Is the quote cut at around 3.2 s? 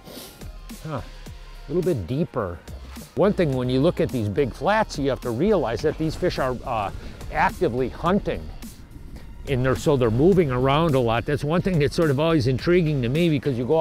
yes; 1 cut; at 3.2 s

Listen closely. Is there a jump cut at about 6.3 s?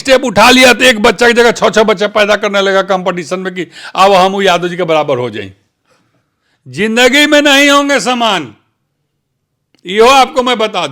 yes; 1 cut; at 6.3 s

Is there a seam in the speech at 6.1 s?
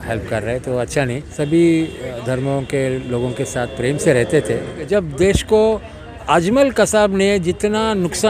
no; 2 cuts; at 1.2 s, 4.9 s

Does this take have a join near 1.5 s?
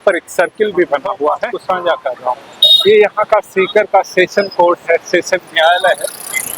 yes; 1 cut; at 1.5 s

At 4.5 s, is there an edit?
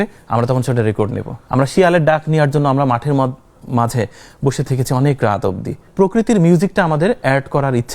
no; 2 cuts; at 1.3 s, 5.9 s

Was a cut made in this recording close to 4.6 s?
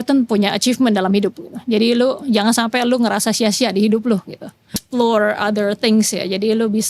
yes; 1 cut; at 4.6 s

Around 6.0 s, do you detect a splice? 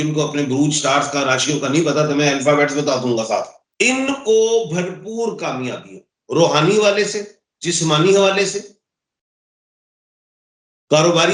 no; 1 cut; at 3.6 s

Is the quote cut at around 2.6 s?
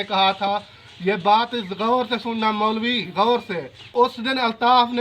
no; 1 cut; at 3.9 s

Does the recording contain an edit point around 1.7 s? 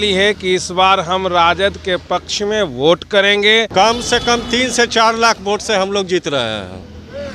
no; 1 cut; at 3.7 s

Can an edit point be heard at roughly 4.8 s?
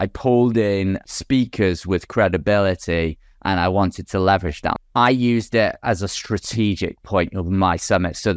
yes; 2 cuts; at 1.0 s, 4.8 s

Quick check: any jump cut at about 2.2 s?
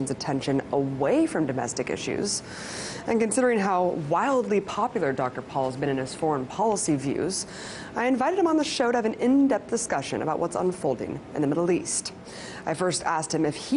yes; 1 cut; at 2.2 s

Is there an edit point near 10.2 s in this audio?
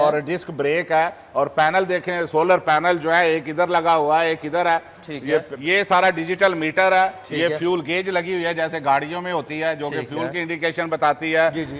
no; 1 cut; at 5.5 s

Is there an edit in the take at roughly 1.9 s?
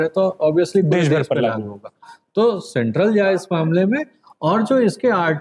no; 0 cuts

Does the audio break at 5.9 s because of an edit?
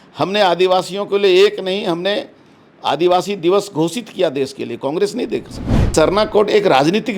yes; 1 cut; at 5.9 s

